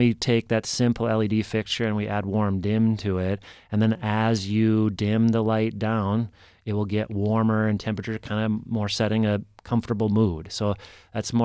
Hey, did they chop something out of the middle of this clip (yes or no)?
no